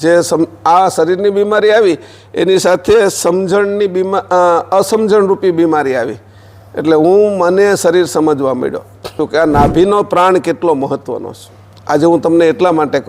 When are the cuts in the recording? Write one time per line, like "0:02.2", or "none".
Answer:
0:09.1